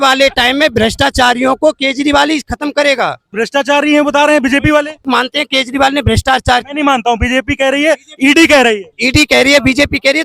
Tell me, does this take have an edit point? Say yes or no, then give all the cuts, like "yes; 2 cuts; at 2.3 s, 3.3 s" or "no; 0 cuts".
yes; 3 cuts; at 3.2 s, 5.0 s, 8.9 s